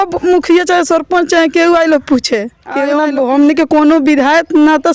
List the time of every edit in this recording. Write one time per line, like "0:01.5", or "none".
0:02.9